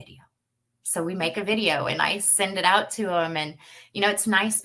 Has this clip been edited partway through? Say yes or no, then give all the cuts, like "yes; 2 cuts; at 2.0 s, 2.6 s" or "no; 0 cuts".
no; 0 cuts